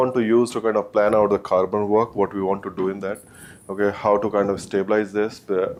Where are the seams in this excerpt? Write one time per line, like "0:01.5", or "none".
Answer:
none